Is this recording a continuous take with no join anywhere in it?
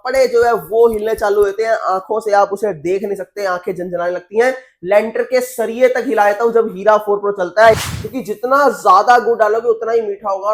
no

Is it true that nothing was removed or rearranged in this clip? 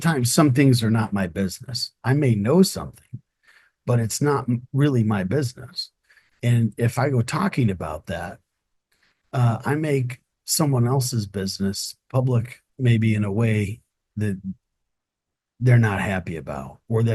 yes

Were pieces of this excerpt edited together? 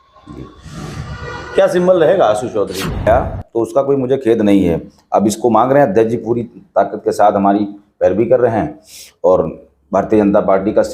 yes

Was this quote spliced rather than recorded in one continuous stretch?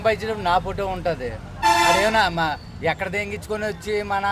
no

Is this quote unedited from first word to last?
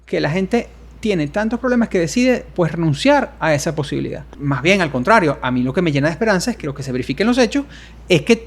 no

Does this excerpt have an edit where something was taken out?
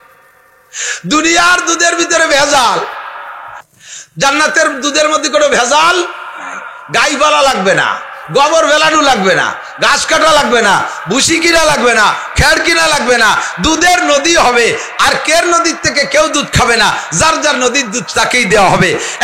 yes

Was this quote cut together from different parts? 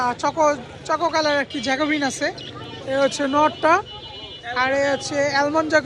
no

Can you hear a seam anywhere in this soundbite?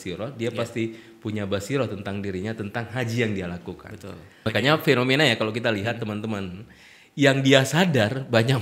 yes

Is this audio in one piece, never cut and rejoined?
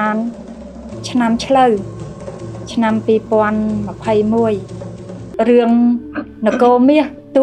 no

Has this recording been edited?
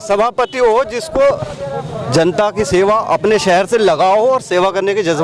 no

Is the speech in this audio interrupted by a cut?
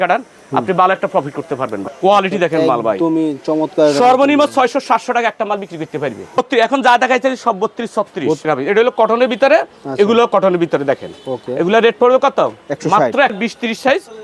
yes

